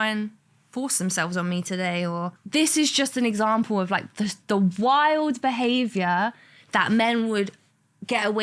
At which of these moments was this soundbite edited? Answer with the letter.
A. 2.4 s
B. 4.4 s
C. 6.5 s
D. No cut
A